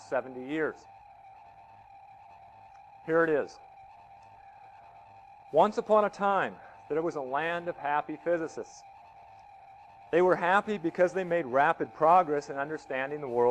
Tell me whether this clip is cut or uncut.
cut